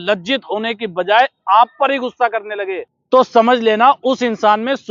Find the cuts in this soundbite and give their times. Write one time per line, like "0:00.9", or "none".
0:02.9